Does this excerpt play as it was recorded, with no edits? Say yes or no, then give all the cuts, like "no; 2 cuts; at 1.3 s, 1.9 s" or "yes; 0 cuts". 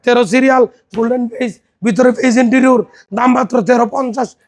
yes; 0 cuts